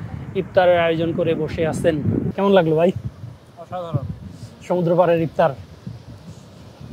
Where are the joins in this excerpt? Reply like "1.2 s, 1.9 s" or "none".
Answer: 2.3 s